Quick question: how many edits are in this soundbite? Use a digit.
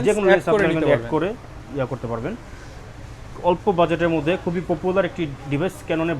0